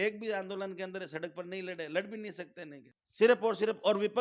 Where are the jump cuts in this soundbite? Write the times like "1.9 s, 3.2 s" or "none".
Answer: none